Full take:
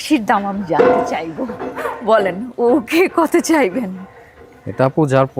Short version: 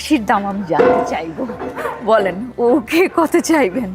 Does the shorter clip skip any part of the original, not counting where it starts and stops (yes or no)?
no